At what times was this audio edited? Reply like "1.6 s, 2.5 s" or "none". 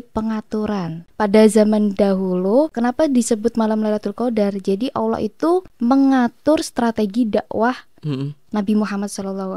1.1 s, 2.7 s, 5.7 s

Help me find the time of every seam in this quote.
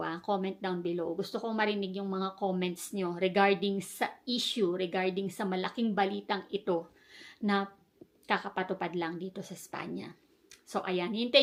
none

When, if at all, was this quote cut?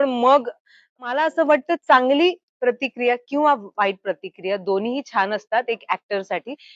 1.1 s

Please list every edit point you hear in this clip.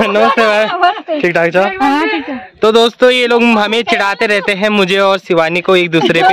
none

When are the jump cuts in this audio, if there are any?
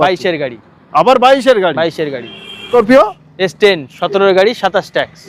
2.7 s

